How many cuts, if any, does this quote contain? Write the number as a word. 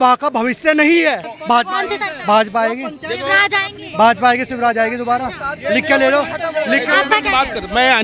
zero